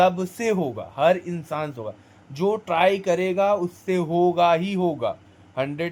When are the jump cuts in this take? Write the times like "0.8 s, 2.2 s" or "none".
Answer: none